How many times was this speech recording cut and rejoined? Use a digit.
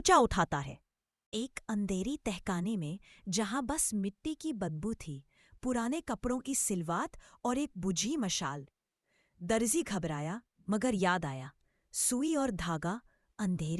1